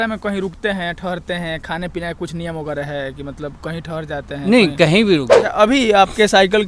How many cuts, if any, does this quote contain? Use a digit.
1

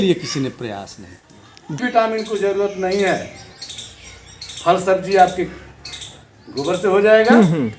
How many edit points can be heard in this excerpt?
1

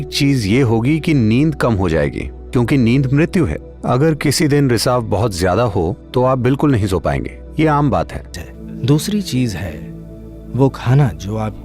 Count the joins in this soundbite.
1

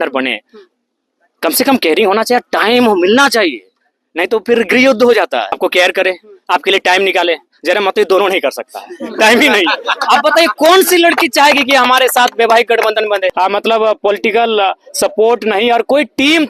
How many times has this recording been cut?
2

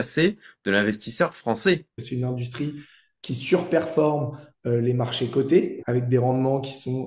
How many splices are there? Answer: 2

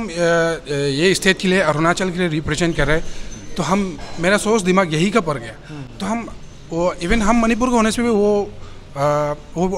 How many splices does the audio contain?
0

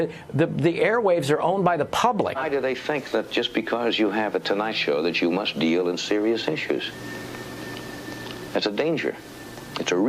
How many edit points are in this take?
1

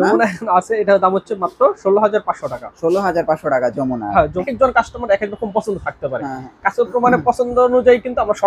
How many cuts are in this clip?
1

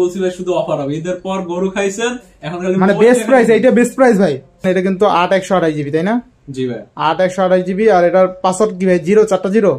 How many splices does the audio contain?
1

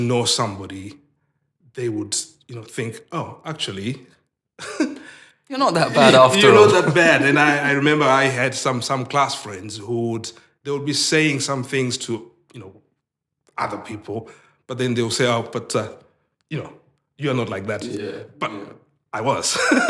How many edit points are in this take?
0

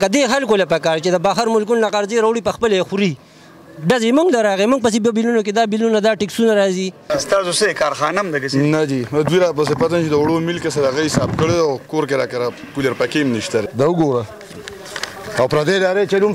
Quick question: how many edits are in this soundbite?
2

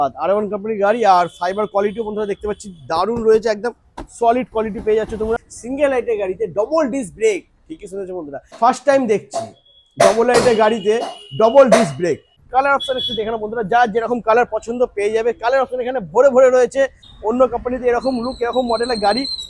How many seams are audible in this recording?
4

